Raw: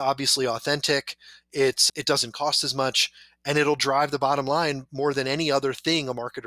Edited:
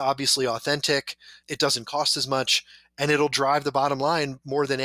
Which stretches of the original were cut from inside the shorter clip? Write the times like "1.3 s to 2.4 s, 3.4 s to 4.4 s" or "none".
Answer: 1.4 s to 1.9 s

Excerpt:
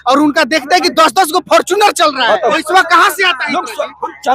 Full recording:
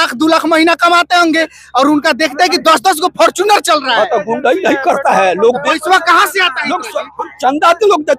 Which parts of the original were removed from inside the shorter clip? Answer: 4.2 s to 5.7 s

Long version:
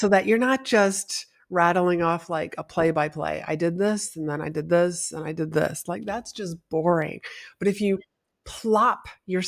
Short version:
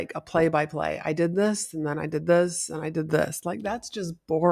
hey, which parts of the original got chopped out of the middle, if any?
none

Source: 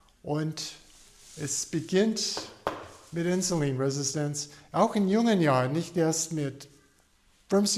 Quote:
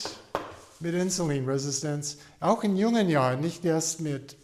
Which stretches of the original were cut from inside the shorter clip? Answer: none

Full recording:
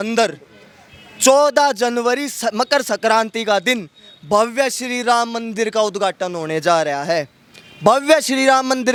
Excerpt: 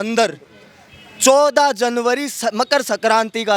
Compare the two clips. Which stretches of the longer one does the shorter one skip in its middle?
none

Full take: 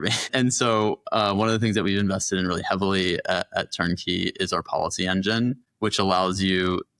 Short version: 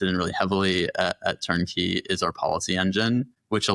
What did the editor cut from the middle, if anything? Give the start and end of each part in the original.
none

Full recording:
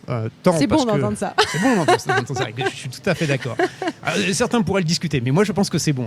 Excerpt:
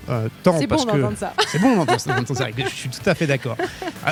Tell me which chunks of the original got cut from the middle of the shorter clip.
none

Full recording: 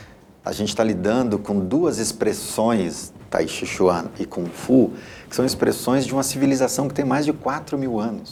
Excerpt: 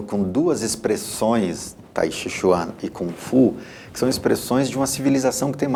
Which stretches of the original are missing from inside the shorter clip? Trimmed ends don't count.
none

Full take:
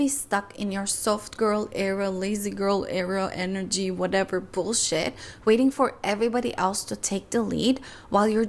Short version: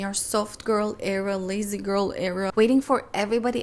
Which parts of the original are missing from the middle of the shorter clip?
3.2 s to 5.4 s

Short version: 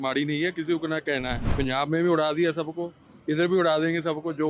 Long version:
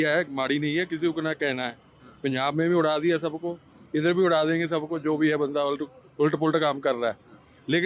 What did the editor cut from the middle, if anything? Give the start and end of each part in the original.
1.8 s to 2.1 s

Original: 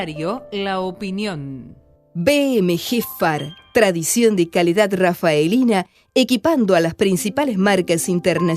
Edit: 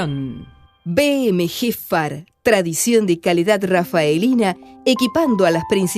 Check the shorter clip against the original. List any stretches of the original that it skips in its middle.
none

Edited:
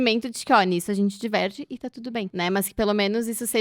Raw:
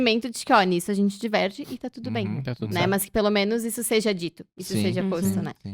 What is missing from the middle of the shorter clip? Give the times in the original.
2.3 s to 2.7 s

